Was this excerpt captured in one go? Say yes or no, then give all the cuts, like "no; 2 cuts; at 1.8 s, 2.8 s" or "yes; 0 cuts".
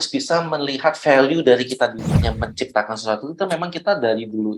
no; 1 cut; at 2.2 s